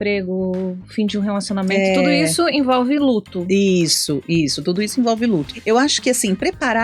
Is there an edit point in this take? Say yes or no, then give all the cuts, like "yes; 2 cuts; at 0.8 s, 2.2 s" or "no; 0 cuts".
yes; 1 cut; at 5.5 s